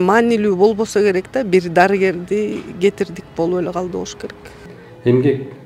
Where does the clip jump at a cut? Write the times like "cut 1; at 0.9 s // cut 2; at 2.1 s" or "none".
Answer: cut 1; at 4.7 s